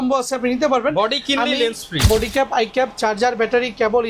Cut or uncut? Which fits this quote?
cut